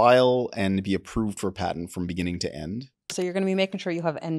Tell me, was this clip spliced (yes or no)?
yes